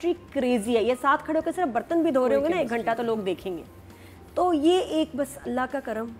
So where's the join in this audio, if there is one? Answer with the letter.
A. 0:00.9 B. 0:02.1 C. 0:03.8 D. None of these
D